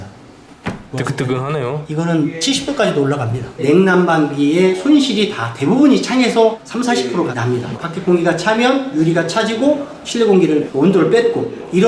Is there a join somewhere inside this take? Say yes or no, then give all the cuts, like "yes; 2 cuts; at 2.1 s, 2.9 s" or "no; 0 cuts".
yes; 4 cuts; at 0.9 s, 1.8 s, 3.4 s, 7.8 s